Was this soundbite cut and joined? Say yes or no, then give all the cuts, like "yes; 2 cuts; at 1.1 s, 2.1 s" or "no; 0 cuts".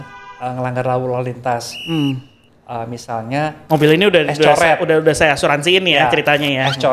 no; 0 cuts